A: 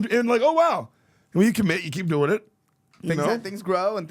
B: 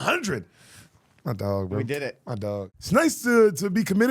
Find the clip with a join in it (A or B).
B